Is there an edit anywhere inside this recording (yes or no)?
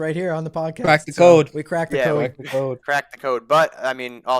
no